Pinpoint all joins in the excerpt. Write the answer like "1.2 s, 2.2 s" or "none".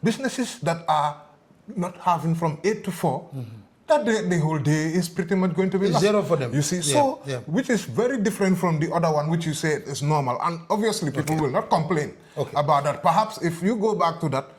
none